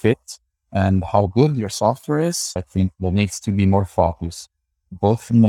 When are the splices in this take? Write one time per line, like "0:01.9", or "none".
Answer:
0:02.6